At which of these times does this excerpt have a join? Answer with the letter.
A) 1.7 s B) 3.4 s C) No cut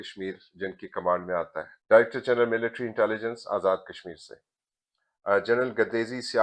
A